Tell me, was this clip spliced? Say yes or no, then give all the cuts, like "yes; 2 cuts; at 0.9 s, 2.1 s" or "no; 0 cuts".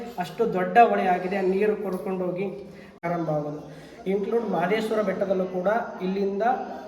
yes; 1 cut; at 3.0 s